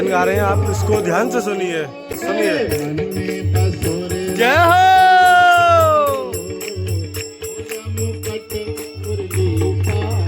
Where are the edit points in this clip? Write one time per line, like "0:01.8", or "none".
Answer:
0:02.1